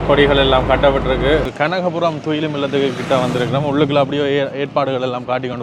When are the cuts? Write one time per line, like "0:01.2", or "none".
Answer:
0:01.5